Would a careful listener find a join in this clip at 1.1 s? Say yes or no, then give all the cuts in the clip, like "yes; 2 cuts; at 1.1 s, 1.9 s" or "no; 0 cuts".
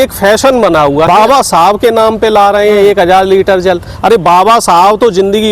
yes; 1 cut; at 1.1 s